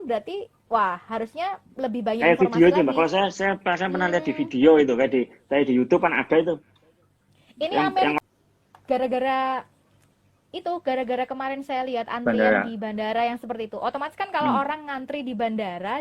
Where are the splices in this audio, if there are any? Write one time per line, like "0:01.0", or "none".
0:08.2